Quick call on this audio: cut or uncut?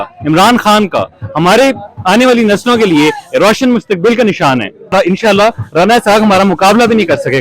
cut